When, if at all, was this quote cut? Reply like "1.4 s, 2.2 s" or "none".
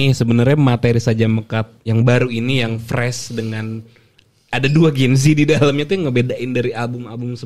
none